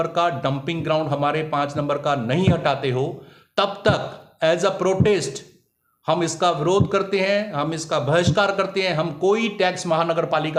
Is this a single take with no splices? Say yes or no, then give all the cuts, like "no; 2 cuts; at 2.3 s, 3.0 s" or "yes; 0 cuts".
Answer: yes; 0 cuts